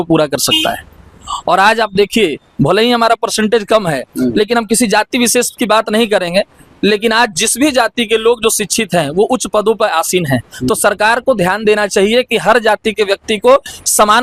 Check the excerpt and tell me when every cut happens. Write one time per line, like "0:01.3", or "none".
none

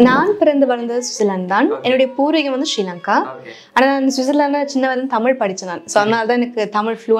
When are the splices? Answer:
none

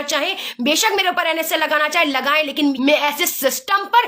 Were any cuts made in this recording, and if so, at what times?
0:02.7

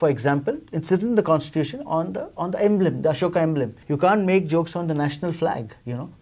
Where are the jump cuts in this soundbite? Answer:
0:03.8

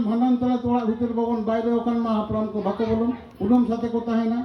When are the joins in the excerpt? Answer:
0:03.3

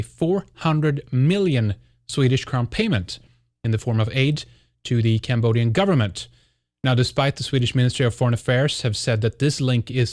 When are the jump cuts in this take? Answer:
0:01.1

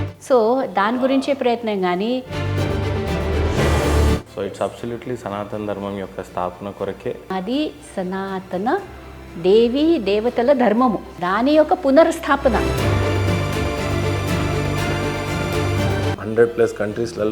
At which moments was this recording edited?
0:16.2

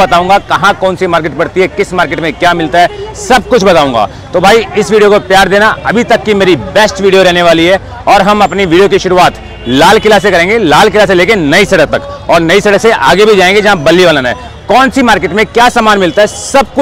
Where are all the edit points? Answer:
none

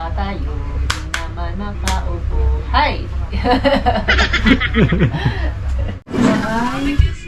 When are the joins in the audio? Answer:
none

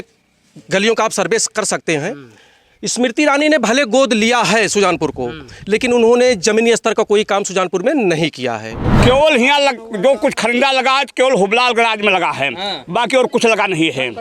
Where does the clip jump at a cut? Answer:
0:08.8

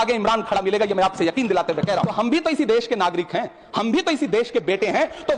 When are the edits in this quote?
0:02.1

